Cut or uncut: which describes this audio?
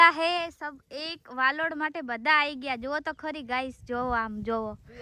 uncut